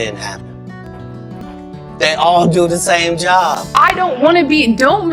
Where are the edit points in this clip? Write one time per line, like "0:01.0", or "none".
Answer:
0:03.6